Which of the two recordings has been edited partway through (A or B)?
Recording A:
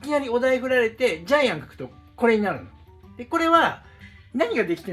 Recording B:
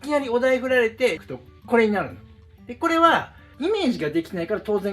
B